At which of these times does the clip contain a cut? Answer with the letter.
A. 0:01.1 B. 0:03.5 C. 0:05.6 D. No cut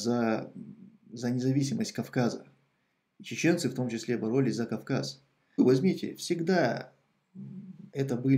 C